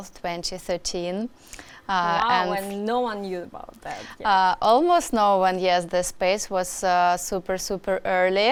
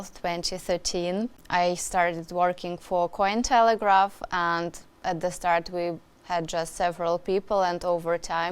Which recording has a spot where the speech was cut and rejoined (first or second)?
second